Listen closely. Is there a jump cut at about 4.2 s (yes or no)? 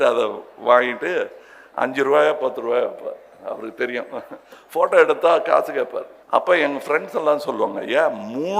no